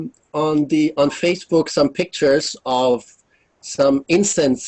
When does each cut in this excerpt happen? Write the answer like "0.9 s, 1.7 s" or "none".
3.3 s